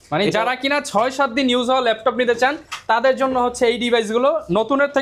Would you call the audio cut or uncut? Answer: uncut